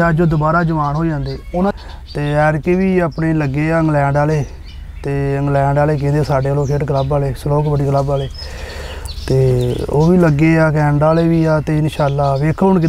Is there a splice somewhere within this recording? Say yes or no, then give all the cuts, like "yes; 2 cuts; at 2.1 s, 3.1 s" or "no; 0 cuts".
yes; 1 cut; at 1.7 s